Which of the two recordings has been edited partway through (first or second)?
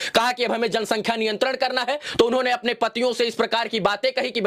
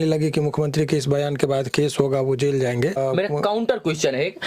second